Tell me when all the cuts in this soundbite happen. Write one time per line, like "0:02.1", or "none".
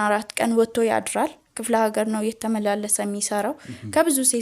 none